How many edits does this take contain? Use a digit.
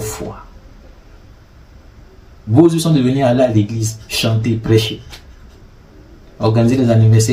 0